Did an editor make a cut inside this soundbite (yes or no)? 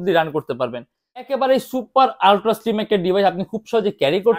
yes